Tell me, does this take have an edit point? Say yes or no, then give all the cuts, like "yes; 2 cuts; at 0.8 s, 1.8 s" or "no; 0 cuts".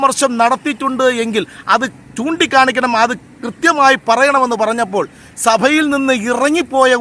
no; 0 cuts